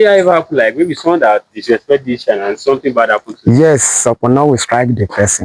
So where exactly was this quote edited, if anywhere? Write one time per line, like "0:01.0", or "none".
none